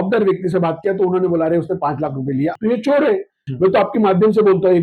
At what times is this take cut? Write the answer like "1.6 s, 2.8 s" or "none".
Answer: 2.6 s, 3.5 s

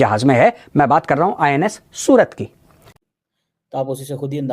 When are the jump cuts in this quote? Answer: 3.0 s

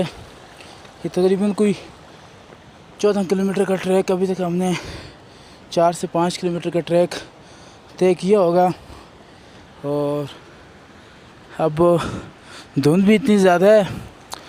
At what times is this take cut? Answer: none

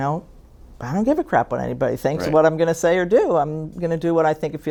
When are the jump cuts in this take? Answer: none

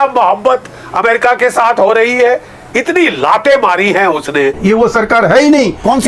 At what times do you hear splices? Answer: 4.6 s

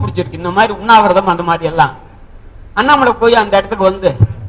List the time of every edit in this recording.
none

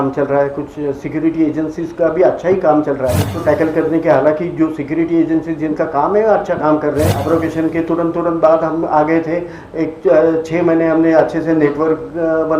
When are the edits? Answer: 3.3 s, 7.2 s

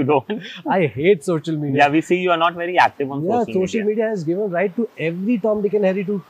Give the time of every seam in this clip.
none

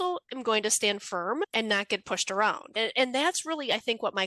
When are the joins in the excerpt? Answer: 1.5 s, 2.8 s

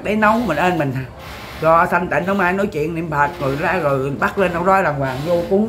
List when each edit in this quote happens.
none

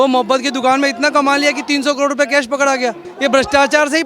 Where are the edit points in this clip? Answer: 3.1 s

